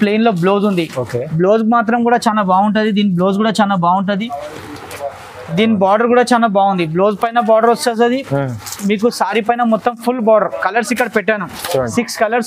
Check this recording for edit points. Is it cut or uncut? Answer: uncut